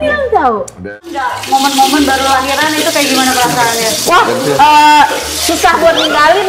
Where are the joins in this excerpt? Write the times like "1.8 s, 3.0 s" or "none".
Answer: 0.9 s